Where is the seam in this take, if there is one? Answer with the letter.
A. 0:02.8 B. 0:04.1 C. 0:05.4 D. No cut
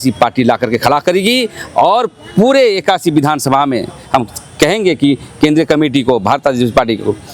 D